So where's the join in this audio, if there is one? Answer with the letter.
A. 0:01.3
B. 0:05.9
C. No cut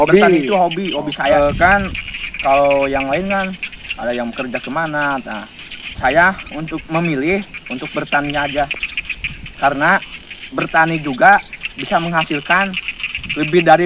A